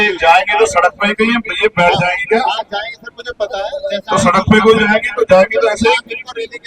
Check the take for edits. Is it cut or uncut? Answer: cut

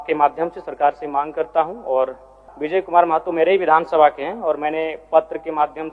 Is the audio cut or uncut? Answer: cut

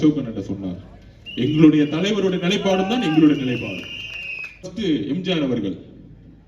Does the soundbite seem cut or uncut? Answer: cut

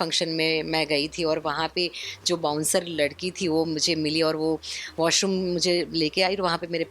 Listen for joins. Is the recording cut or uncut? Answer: uncut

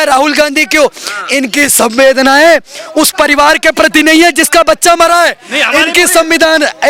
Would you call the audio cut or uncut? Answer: uncut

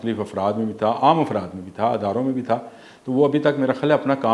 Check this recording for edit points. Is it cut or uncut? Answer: uncut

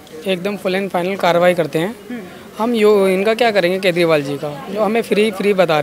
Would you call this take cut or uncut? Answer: uncut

